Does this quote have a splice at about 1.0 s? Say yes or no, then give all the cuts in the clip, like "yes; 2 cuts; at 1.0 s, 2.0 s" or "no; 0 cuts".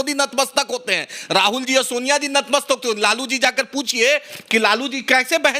no; 0 cuts